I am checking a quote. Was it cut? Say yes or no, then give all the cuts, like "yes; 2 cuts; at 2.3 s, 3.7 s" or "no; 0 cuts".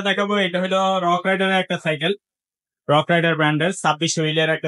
no; 0 cuts